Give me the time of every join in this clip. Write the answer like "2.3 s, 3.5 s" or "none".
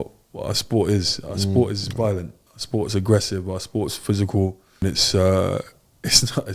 4.8 s